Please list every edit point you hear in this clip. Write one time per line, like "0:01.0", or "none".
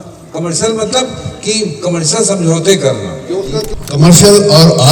0:03.7